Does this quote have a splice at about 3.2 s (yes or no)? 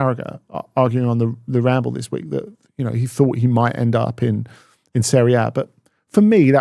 no